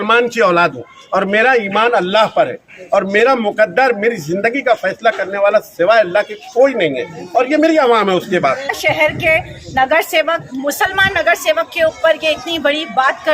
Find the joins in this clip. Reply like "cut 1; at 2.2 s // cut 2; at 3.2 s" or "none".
cut 1; at 8.8 s